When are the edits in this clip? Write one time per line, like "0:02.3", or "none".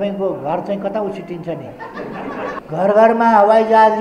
0:02.6